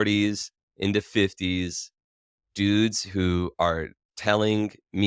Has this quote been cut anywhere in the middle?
no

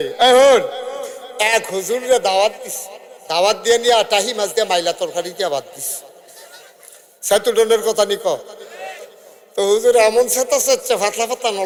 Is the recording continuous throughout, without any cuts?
yes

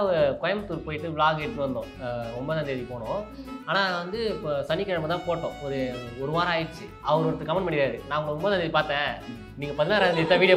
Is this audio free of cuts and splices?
yes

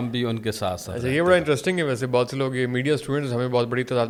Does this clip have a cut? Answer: no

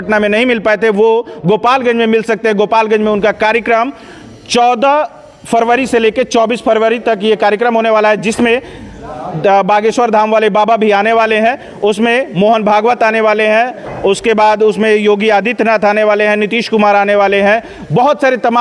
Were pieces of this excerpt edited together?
no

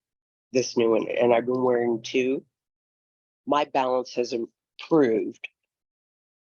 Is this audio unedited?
yes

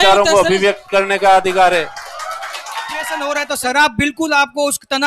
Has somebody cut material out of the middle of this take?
yes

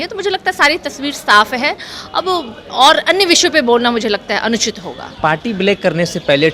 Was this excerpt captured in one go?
yes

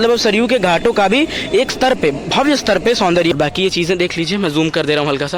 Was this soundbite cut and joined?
yes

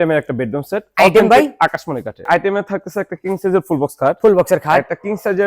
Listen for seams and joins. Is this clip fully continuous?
no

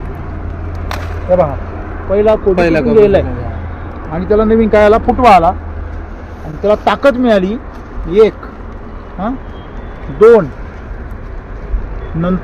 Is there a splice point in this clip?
no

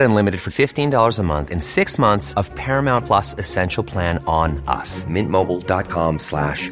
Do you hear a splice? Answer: no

